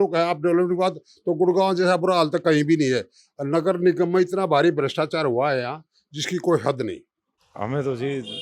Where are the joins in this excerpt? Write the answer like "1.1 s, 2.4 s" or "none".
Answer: 7.5 s